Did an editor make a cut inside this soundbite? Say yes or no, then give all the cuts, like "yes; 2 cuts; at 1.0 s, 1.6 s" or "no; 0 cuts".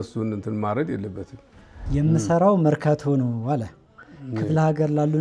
yes; 1 cut; at 1.7 s